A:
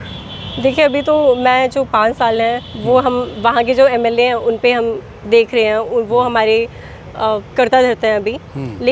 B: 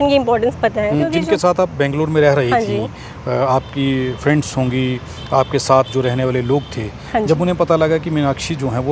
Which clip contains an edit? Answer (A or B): B